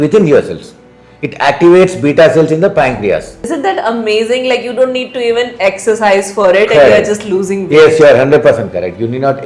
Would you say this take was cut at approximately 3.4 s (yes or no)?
yes